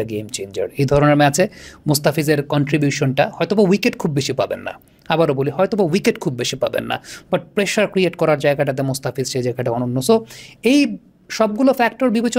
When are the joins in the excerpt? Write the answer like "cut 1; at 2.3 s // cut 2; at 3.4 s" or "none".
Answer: none